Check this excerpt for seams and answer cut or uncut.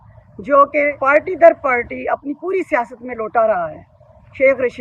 cut